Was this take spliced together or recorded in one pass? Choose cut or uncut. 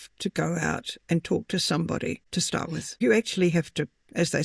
cut